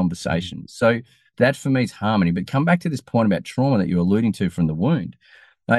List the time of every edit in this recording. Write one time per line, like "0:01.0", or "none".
0:01.2